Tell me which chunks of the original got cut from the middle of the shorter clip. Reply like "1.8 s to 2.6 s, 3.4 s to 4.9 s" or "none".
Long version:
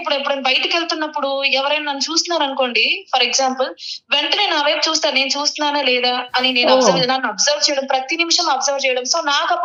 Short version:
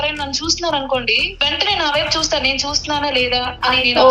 2.9 s to 3.9 s